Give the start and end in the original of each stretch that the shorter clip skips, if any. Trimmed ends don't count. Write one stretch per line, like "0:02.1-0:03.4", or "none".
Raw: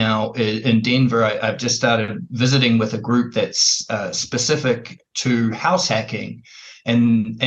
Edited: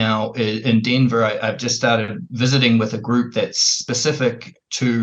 0:03.7-0:04.2